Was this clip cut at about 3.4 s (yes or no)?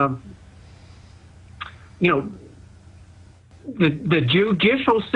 no